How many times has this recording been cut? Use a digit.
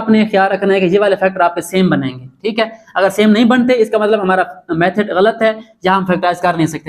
0